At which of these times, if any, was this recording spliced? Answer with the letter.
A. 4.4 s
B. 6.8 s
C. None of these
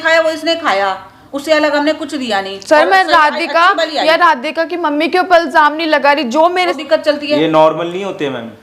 B